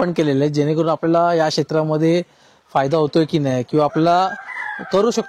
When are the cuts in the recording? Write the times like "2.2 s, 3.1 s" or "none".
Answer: none